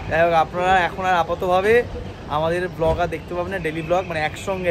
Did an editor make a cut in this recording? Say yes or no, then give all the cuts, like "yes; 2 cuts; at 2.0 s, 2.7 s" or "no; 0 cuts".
no; 0 cuts